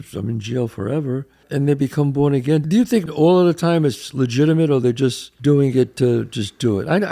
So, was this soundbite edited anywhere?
yes; 3 cuts; at 1.4 s, 3.1 s, 5.3 s

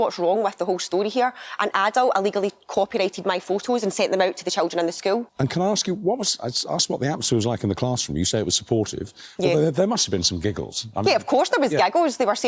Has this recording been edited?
yes; 1 cut; at 5.3 s

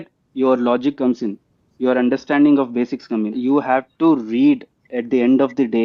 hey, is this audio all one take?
no; 1 cut; at 3.3 s

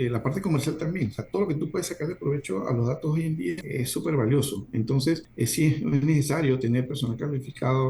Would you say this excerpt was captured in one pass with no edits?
no; 2 cuts; at 3.6 s, 5.3 s

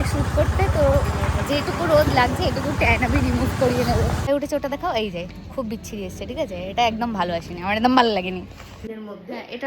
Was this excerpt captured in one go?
no; 2 cuts; at 4.3 s, 8.9 s

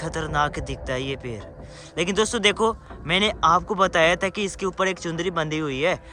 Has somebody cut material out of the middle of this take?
no; 0 cuts

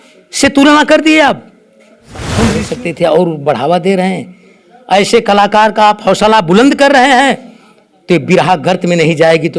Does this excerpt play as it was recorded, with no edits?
no; 1 cut; at 2.4 s

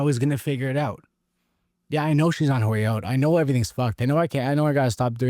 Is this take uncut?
yes; 0 cuts

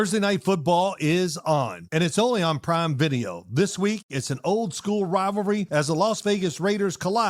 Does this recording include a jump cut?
no; 0 cuts

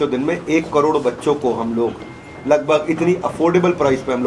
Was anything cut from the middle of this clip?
no; 0 cuts

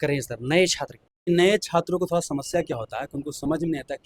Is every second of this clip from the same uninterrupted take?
no; 1 cut; at 1.1 s

